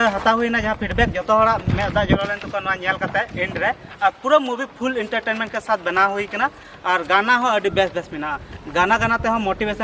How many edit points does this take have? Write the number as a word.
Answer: zero